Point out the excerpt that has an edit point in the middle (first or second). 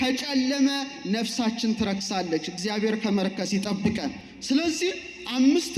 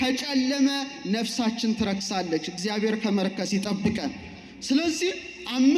first